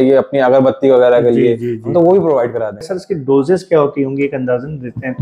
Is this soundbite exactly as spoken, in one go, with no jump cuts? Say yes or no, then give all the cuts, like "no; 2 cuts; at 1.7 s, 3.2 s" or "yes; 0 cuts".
no; 1 cut; at 3.0 s